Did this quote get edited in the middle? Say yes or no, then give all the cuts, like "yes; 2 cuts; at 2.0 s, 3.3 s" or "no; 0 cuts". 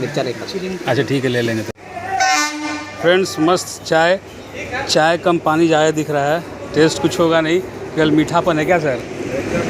yes; 1 cut; at 1.8 s